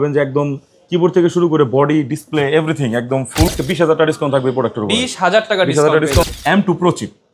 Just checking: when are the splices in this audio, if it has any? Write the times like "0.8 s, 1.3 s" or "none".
3.5 s, 6.3 s